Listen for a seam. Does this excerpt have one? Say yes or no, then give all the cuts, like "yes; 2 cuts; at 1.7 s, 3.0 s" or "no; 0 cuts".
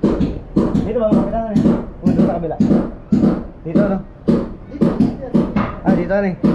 no; 0 cuts